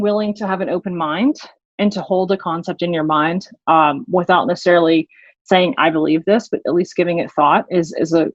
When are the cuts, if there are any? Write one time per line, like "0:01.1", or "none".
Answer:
none